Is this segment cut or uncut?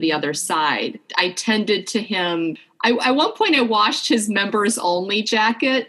cut